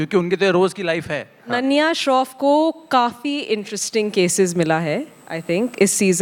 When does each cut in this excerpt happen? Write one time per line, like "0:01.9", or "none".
0:01.5